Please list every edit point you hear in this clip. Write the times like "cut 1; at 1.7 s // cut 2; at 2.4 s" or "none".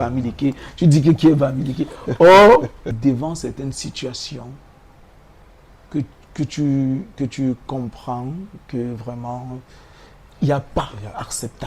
cut 1; at 3.0 s